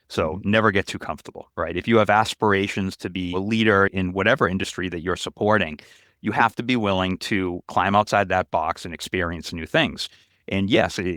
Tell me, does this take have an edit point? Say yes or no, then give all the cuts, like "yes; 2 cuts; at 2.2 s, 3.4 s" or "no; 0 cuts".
yes; 3 cuts; at 3.3 s, 3.9 s, 7.6 s